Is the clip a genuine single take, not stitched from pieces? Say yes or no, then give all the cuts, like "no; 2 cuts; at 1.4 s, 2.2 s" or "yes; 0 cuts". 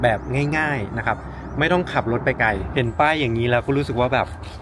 no; 1 cut; at 2.7 s